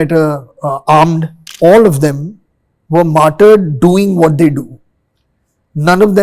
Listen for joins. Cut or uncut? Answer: cut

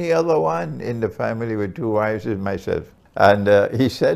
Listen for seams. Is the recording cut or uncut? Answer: cut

